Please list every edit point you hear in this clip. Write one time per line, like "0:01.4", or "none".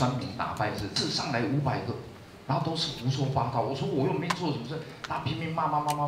0:00.9

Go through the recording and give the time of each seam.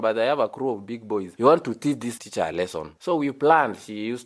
0:01.3
0:02.2

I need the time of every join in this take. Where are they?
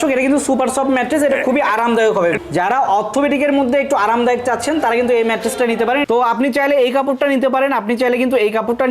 0:06.0

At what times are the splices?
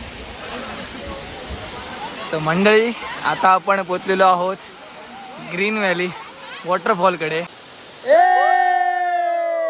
0:07.6

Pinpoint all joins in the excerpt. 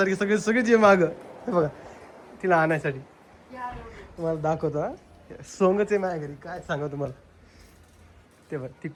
none

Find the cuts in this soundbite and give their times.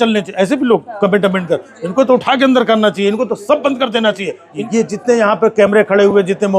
0:04.6

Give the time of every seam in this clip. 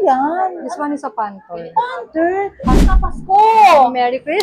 0:02.8

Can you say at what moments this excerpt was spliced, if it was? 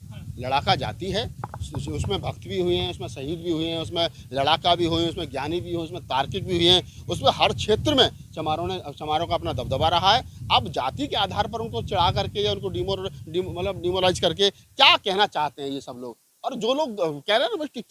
none

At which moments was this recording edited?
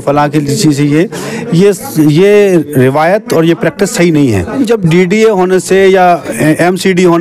0:04.6

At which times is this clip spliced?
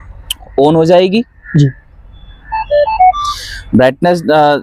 none

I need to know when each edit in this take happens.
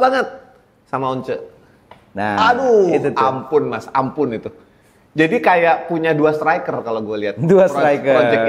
none

